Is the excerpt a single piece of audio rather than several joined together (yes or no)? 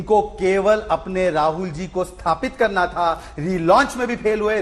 yes